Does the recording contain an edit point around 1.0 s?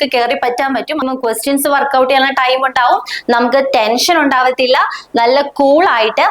yes; 1 cut; at 1.0 s

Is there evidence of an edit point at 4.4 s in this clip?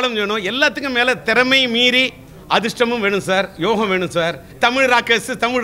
yes; 1 cut; at 4.4 s

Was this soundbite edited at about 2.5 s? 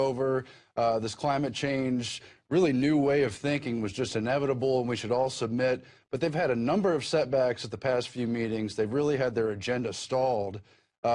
yes; 1 cut; at 2.5 s

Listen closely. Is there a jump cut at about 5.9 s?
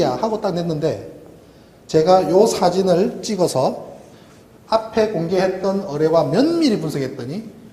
yes; 1 cut; at 5.9 s

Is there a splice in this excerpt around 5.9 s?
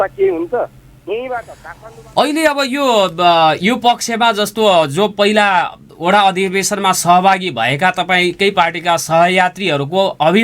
no; 1 cut; at 1.6 s

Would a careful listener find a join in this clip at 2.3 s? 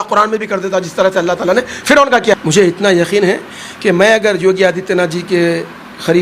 yes; 1 cut; at 2.3 s

